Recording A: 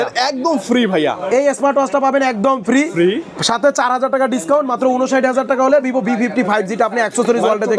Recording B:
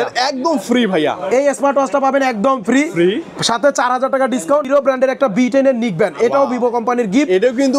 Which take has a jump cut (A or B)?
B